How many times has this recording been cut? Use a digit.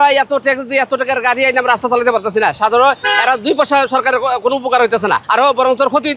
1